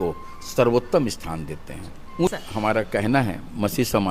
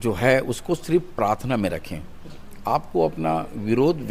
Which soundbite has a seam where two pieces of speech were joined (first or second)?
first